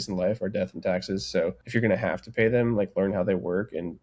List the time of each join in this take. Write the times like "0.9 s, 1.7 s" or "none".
1.6 s